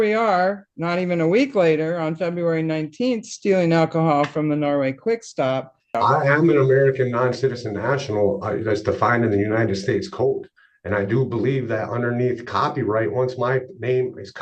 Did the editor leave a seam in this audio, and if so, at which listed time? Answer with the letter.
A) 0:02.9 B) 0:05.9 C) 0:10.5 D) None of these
B